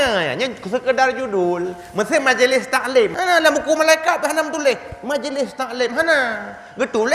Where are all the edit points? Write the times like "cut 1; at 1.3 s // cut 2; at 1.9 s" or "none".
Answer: cut 1; at 3.1 s